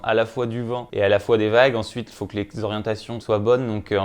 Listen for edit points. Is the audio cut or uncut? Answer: cut